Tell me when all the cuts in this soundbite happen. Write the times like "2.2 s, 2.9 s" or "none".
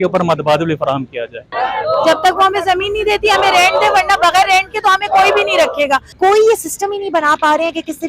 1.5 s, 6.1 s